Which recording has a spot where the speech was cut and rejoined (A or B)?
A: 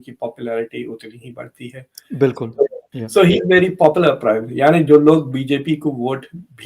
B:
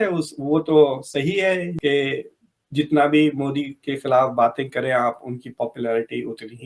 A